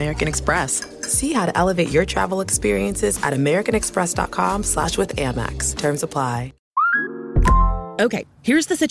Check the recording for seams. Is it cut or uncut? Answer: cut